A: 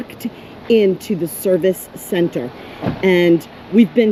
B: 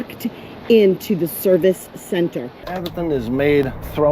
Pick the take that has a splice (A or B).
B